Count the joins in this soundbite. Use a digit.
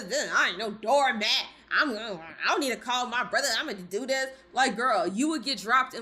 0